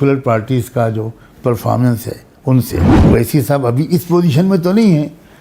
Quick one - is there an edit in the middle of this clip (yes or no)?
yes